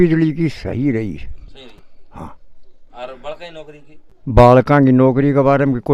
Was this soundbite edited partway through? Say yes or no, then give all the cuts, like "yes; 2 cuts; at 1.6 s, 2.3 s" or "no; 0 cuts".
no; 0 cuts